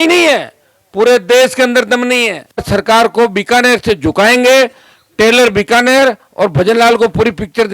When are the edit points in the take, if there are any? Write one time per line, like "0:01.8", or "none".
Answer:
0:02.6

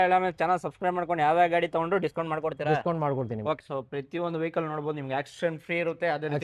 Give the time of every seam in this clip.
0:03.6

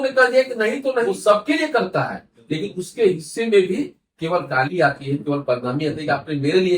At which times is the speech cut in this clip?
0:01.2

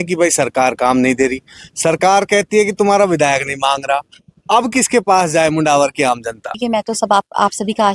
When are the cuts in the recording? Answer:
0:06.5

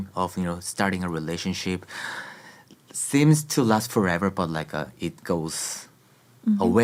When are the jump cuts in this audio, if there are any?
none

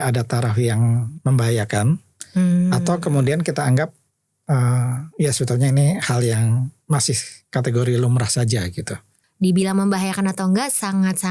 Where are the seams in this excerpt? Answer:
0:09.1

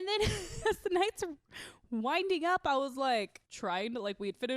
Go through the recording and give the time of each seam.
none

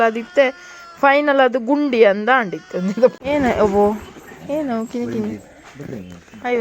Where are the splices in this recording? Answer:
0:03.2

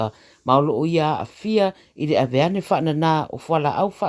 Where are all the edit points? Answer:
none

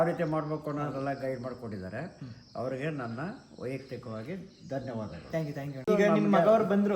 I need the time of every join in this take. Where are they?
0:05.8

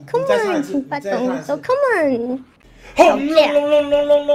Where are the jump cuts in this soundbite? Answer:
0:02.5

